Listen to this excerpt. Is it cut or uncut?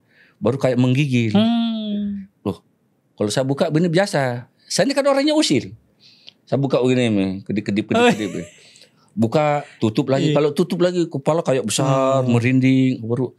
uncut